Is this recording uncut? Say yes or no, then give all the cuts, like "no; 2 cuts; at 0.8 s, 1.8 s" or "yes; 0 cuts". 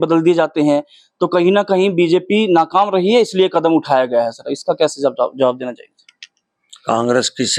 yes; 0 cuts